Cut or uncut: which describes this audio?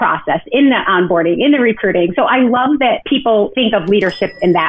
cut